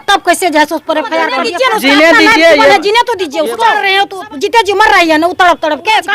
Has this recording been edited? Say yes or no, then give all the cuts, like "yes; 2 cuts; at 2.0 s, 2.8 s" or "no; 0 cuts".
yes; 2 cuts; at 1.4 s, 3.8 s